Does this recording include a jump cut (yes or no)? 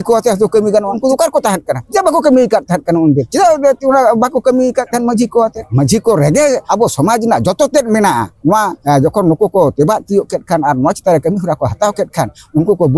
yes